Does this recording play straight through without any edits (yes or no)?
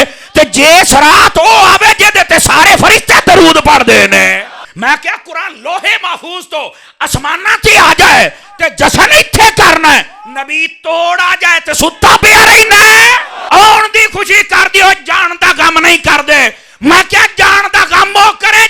no